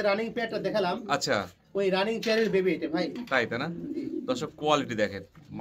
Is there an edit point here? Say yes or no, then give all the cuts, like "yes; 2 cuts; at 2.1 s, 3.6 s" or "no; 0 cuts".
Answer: no; 0 cuts